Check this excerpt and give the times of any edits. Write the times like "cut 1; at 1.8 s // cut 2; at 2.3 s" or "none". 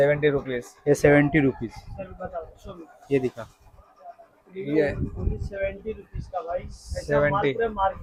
none